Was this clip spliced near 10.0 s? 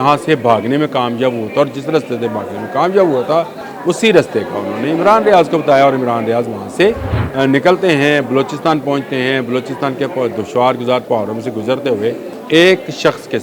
no; 3 cuts; at 3.6 s, 7.1 s, 12.3 s

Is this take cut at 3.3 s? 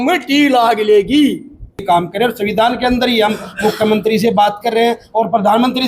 no; 1 cut; at 1.8 s

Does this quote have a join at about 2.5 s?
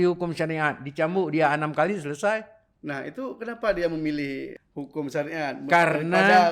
no; 1 cut; at 4.6 s

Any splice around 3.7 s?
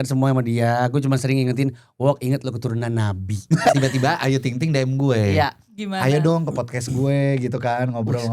yes; 1 cut; at 3.7 s

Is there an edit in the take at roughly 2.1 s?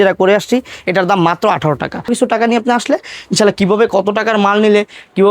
yes; 1 cut; at 2.1 s

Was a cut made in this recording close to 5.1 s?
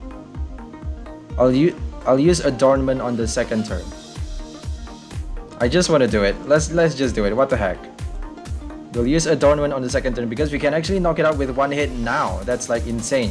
yes; 1 cut; at 5.1 s

